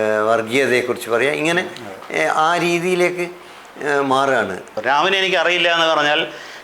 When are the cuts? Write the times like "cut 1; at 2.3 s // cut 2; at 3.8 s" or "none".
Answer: cut 1; at 4.8 s